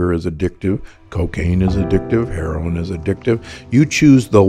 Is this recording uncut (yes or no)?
yes